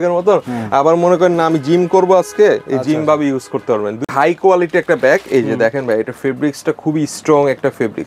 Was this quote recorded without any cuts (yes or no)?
no